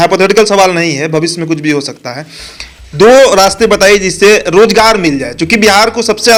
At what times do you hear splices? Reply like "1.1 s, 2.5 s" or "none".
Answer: none